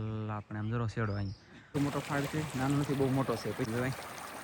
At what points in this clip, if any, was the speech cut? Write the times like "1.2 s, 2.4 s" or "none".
1.8 s, 3.7 s